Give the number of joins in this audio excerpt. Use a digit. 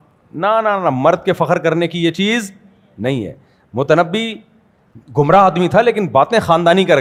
0